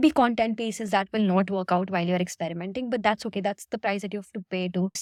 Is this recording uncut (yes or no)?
yes